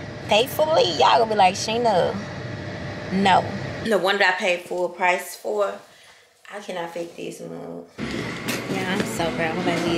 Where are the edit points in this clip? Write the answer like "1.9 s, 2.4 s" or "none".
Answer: 3.8 s, 8.0 s